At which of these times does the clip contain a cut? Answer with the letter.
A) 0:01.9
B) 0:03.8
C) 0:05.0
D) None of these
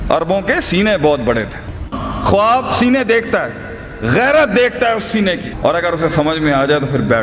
A